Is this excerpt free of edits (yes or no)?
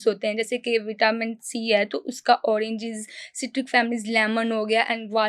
yes